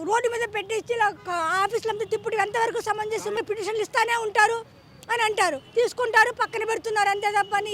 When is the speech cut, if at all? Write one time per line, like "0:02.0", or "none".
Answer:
0:03.4